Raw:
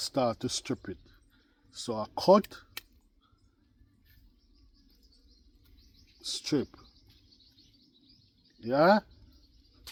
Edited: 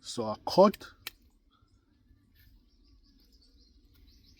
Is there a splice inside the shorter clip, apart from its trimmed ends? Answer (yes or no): no